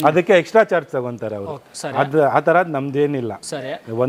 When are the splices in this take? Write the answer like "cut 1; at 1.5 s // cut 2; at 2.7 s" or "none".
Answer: none